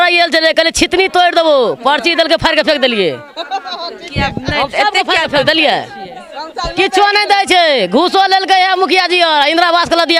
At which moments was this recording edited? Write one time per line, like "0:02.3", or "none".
none